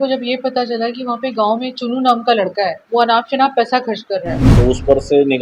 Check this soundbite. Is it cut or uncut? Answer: cut